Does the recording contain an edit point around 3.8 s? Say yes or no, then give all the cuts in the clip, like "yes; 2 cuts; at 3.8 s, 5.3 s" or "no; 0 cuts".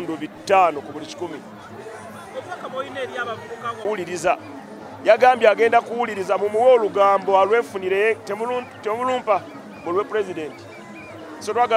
yes; 1 cut; at 3.8 s